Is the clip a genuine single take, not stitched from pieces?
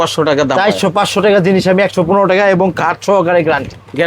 yes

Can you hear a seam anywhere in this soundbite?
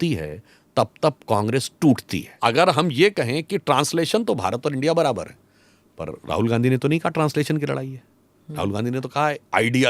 yes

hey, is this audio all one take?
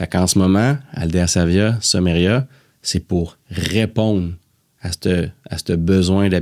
yes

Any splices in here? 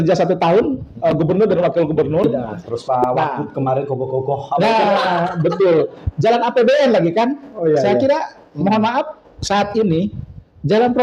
yes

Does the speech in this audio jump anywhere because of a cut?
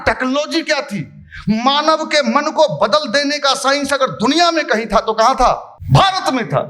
yes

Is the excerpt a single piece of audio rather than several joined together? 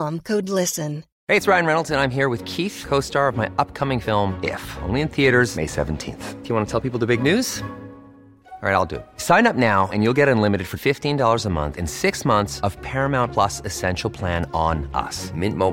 no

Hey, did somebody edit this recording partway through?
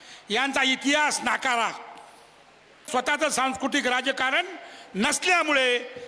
yes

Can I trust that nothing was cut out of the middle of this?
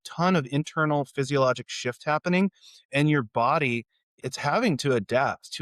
no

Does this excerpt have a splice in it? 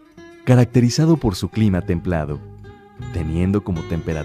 no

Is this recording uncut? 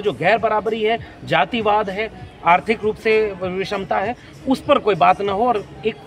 yes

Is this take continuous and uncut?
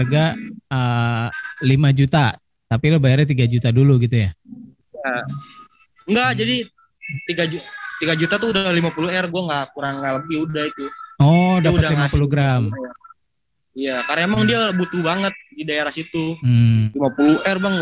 no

